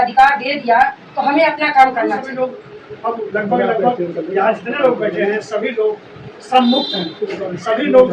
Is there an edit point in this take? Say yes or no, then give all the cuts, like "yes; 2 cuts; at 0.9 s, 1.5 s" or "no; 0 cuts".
yes; 1 cut; at 2.2 s